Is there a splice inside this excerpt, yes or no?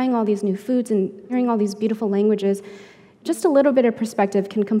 yes